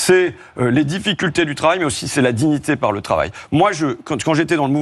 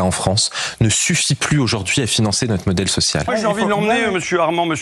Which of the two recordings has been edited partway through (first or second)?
second